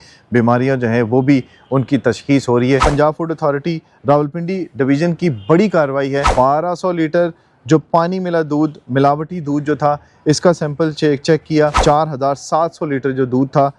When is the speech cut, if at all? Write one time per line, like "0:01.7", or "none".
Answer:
0:02.9
0:06.3
0:11.8